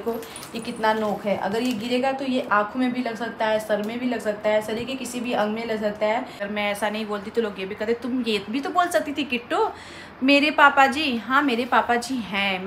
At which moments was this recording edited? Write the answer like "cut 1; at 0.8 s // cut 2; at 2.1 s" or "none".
cut 1; at 6.4 s